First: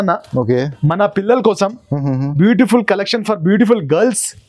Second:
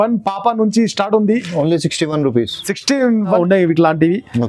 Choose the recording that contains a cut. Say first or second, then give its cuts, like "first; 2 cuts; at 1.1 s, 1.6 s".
second; 1 cut; at 3.2 s